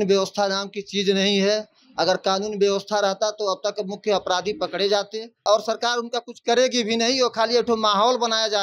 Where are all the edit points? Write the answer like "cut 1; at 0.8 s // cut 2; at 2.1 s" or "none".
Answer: cut 1; at 5.4 s